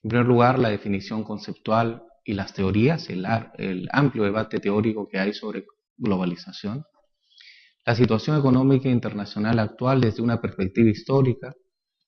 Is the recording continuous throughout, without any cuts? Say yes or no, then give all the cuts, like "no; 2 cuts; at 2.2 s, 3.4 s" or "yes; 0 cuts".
no; 1 cut; at 5.4 s